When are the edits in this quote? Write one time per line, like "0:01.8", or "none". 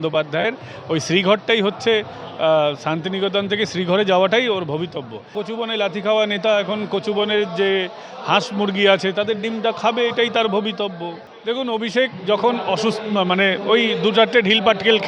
0:05.4
0:11.2